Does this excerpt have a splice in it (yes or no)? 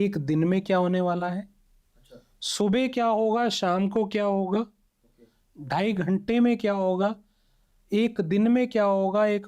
no